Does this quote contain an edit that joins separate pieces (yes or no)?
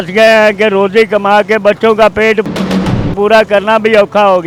no